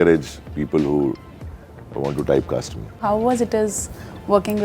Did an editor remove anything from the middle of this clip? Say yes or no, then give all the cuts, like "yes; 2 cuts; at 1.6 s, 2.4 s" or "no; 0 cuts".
yes; 1 cut; at 3.0 s